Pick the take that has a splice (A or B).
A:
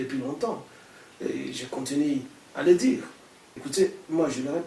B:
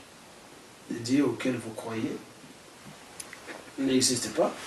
A